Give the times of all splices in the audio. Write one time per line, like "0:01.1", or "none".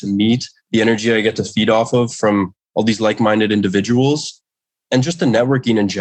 none